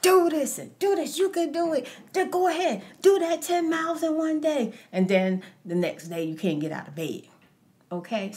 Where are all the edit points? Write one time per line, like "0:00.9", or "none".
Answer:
none

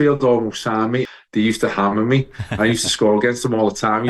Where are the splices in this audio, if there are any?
0:01.1

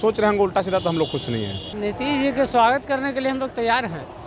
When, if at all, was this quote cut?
0:01.6

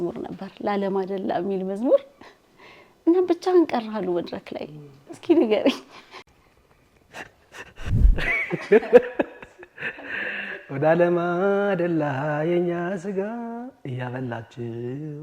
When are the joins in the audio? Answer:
0:07.9

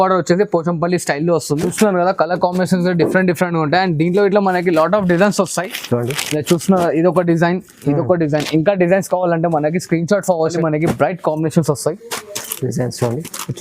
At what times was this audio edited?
0:01.7
0:10.6

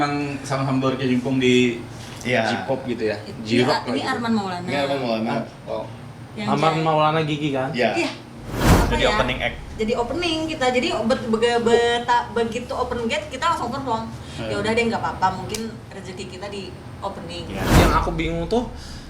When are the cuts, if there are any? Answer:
0:08.8
0:17.7

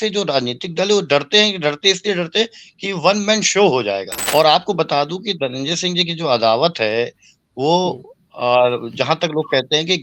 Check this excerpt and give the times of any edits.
0:04.1

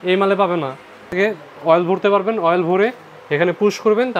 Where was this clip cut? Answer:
0:01.0

